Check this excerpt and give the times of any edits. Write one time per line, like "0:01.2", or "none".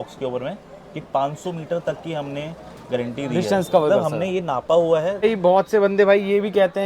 0:05.2